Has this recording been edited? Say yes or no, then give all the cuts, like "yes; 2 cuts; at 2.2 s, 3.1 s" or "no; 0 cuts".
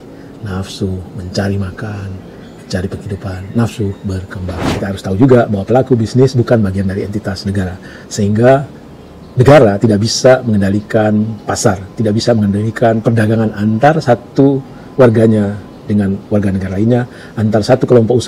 yes; 1 cut; at 4.9 s